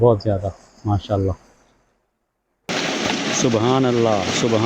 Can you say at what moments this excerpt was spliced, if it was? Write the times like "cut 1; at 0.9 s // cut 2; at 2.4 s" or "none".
cut 1; at 2.7 s